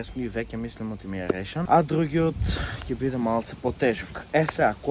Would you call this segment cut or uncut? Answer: cut